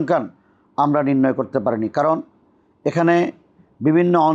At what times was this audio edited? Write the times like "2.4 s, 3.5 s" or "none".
none

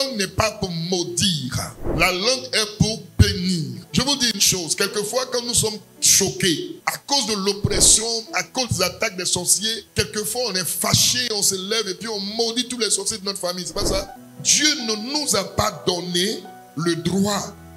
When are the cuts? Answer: none

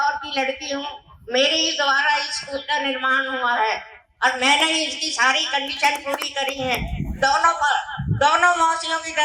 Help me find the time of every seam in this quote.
none

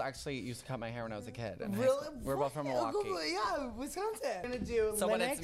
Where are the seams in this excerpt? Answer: 4.5 s

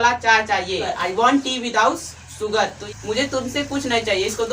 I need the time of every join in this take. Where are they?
0.9 s, 2.9 s

